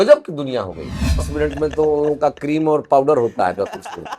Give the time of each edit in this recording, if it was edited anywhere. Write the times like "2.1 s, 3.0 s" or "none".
1.3 s